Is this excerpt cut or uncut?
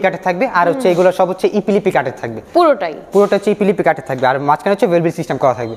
uncut